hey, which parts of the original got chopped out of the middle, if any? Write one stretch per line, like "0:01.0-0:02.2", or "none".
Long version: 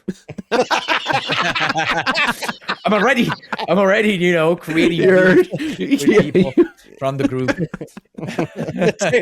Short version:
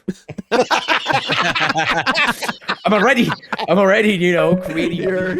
none